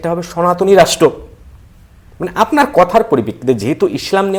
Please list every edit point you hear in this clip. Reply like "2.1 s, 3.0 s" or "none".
none